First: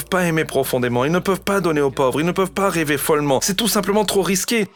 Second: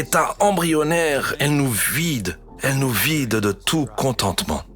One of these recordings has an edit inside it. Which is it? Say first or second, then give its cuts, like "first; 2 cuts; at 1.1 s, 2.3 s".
second; 2 cuts; at 1.3 s, 2.5 s